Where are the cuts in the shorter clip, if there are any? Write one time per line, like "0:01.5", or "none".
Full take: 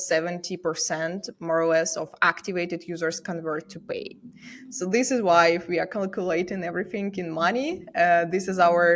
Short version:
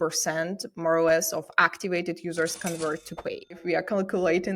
0:03.6

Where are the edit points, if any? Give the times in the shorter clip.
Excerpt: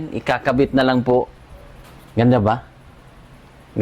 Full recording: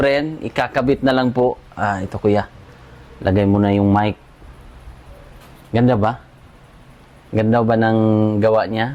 0:01.4

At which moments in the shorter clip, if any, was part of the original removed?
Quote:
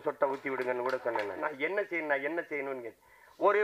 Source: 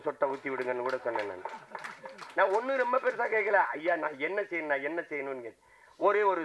0:01.4

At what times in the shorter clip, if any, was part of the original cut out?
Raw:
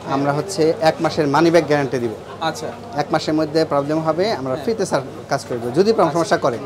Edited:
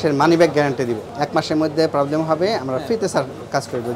0:01.1

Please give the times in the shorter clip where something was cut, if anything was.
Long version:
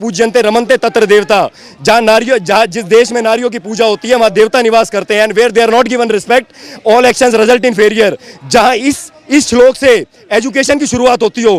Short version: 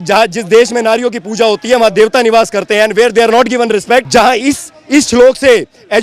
0:04.1

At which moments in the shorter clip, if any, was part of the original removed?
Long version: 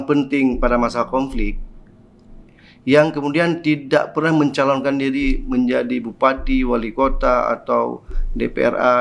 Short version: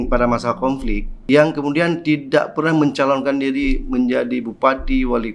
0:01.1

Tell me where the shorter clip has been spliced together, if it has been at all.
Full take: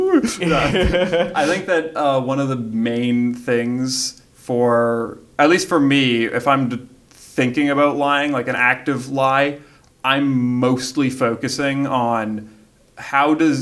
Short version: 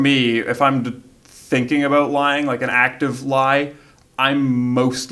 none

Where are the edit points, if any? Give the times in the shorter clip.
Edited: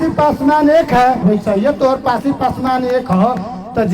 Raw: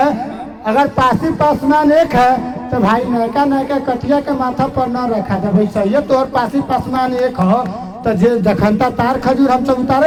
0:01.2

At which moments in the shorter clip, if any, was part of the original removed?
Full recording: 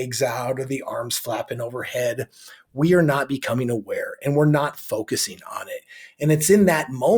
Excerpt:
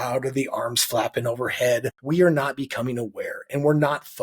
0:02.0

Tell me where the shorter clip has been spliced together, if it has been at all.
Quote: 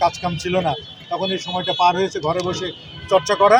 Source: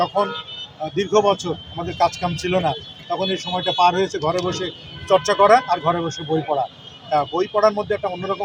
none

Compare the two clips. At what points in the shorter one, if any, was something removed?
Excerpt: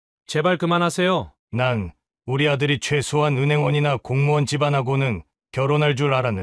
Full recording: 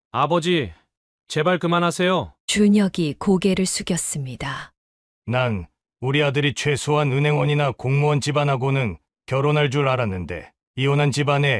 0:01.4

